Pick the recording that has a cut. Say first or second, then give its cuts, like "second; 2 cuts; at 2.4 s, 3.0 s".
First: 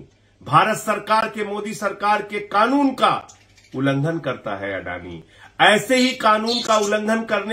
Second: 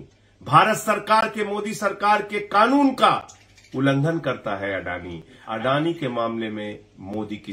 second; 1 cut; at 5.4 s